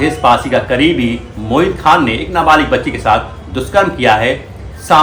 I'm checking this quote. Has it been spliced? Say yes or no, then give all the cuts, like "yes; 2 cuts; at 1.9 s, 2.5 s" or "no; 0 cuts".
no; 0 cuts